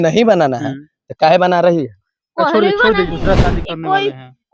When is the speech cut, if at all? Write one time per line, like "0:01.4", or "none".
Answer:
0:03.1